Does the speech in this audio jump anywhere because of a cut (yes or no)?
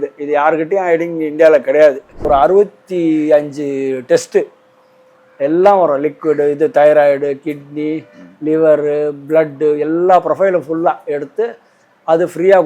yes